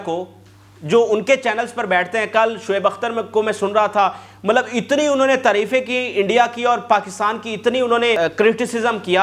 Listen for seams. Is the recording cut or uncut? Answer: cut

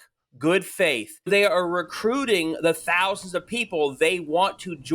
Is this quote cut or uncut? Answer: cut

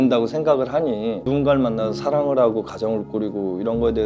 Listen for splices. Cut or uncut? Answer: cut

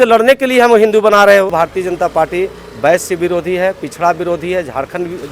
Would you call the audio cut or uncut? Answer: cut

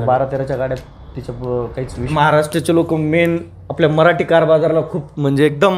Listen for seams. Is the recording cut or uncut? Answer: cut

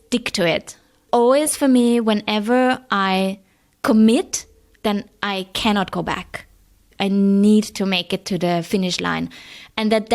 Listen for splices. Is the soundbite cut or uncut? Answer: cut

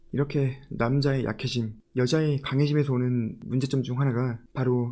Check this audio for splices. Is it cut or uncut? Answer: uncut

